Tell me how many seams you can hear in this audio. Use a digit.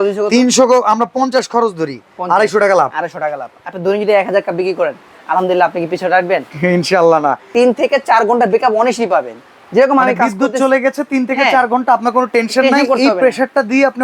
1